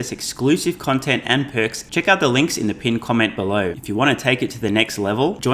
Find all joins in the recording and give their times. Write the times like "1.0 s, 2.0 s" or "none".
1.8 s, 3.8 s